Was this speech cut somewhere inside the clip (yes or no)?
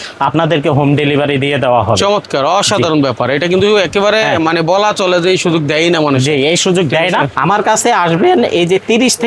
yes